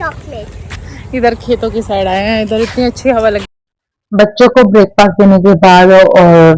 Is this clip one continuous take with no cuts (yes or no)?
no